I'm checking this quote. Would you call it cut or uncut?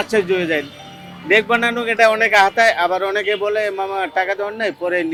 uncut